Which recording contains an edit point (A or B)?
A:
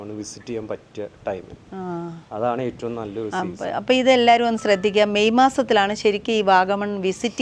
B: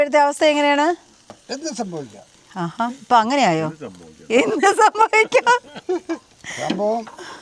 B